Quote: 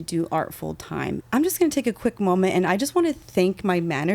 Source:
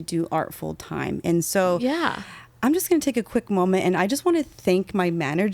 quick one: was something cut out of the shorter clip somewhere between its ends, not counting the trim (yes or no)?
yes